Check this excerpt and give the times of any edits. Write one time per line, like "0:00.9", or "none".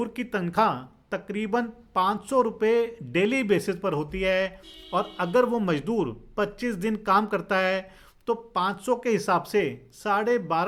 none